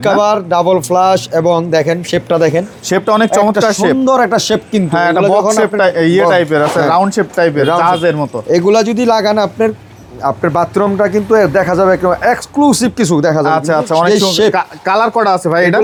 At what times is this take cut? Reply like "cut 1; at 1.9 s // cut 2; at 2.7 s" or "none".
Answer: none